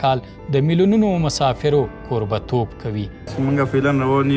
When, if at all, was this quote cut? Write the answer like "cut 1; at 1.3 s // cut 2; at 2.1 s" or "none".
cut 1; at 3.3 s